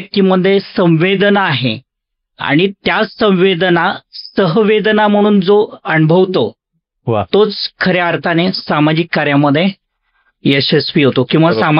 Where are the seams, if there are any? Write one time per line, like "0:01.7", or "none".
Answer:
none

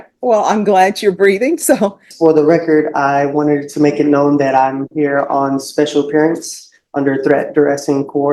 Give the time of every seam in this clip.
0:02.1

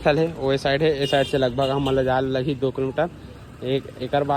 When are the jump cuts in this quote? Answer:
none

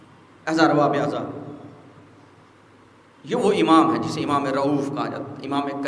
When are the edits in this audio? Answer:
none

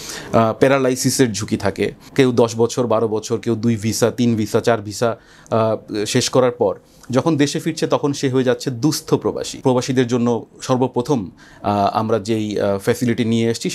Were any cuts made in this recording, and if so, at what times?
0:02.0
0:09.5

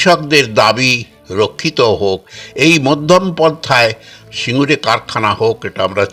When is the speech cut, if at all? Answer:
none

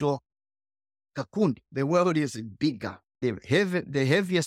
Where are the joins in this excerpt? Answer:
0:01.7
0:03.1

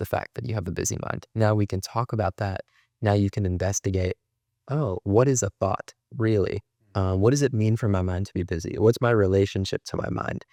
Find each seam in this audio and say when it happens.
none

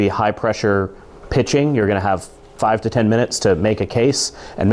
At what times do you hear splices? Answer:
none

